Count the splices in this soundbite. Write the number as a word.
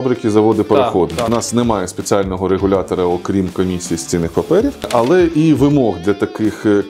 two